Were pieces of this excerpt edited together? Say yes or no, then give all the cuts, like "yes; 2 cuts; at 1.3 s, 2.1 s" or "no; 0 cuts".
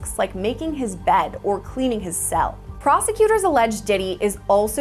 no; 0 cuts